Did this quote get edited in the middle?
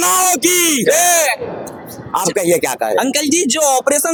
no; 0 cuts

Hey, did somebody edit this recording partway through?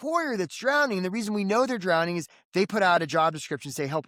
no; 0 cuts

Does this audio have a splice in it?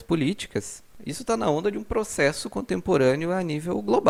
no; 0 cuts

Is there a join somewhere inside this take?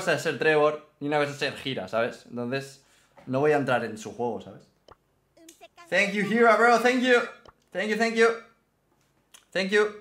no; 0 cuts

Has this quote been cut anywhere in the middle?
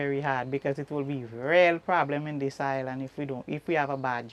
no; 0 cuts

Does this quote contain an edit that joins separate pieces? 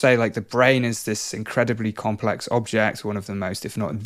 no; 0 cuts

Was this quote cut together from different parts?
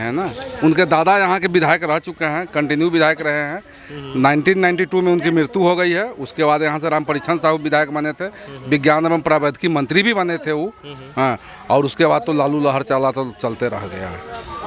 no; 0 cuts

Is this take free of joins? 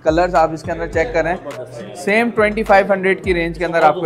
yes; 0 cuts

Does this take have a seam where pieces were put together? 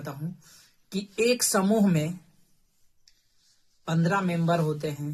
no; 0 cuts

